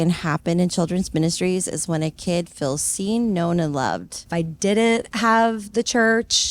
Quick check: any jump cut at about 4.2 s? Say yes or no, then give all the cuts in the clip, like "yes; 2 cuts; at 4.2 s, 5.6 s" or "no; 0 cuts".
yes; 1 cut; at 4.2 s